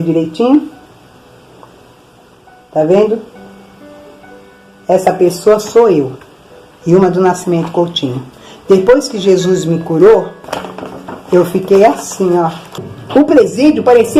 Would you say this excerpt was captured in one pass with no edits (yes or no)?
no